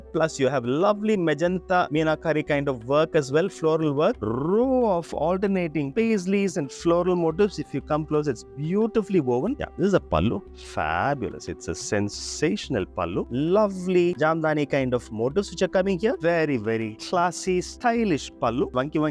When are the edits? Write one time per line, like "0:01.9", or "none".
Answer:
0:04.2
0:09.6
0:13.3
0:16.2